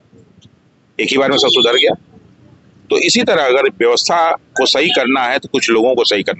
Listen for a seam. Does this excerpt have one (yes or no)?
no